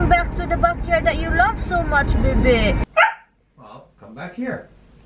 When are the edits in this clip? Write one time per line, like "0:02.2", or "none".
0:02.8